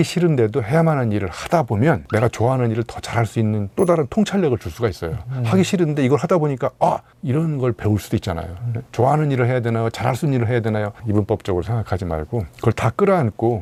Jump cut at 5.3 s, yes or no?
no